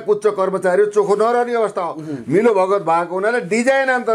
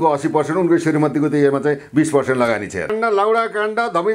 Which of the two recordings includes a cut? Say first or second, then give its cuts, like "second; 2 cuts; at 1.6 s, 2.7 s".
second; 1 cut; at 2.9 s